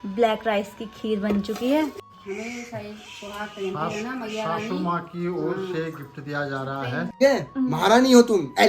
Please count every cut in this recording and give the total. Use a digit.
2